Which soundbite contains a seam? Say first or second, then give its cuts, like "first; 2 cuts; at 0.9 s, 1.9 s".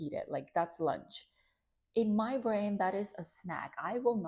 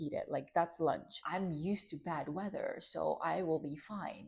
second; 1 cut; at 1.2 s